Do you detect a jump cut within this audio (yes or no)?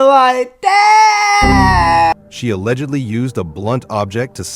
yes